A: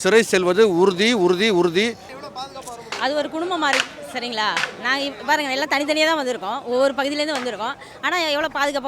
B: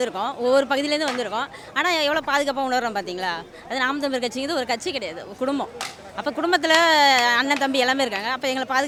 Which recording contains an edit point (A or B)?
A